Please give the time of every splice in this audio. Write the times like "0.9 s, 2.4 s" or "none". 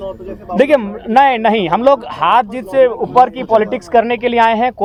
none